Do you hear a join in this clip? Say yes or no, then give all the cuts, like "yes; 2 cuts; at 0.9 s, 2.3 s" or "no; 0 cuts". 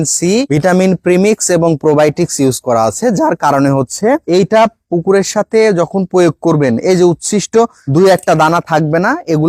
no; 0 cuts